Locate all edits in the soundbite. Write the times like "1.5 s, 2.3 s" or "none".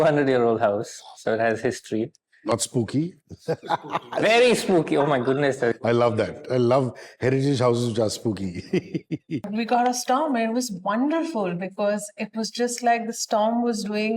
9.5 s